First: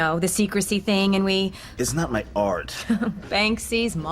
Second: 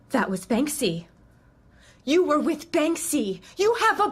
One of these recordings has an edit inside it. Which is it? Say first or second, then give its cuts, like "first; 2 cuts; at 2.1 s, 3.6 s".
first; 1 cut; at 1.6 s